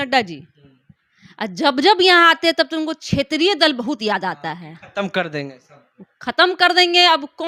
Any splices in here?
no; 0 cuts

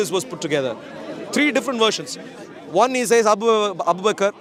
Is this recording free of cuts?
yes; 0 cuts

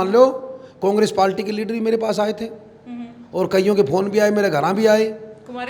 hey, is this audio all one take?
yes; 0 cuts

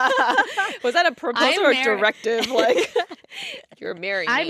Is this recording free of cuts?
yes; 0 cuts

